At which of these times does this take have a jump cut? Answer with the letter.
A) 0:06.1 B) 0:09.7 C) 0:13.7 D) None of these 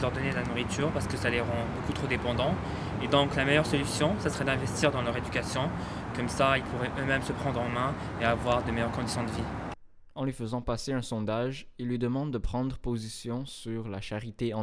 D